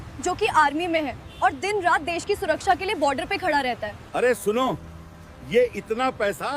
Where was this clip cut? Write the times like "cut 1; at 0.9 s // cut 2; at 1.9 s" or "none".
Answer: cut 1; at 4.0 s